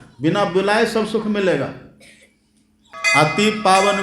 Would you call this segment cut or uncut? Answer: cut